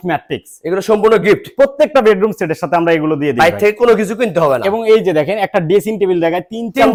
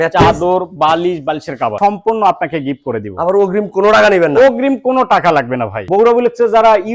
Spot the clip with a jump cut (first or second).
second